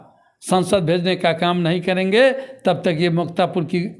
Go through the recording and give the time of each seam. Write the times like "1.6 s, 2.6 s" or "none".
none